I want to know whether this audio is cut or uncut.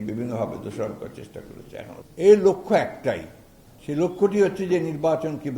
cut